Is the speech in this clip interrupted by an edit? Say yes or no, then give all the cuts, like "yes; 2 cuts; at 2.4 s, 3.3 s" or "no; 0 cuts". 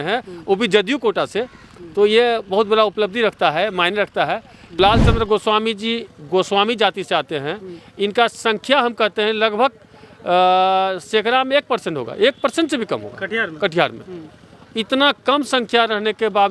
yes; 1 cut; at 4.8 s